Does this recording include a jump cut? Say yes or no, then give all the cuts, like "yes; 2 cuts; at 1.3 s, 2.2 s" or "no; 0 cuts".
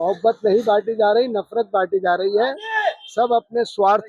no; 0 cuts